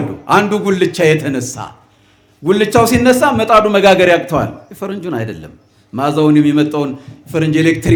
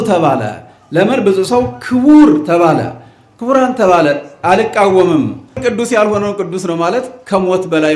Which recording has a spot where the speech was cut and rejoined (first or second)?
second